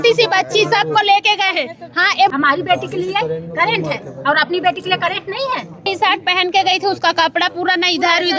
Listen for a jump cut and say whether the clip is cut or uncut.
cut